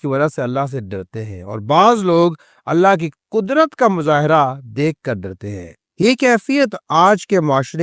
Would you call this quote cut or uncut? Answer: uncut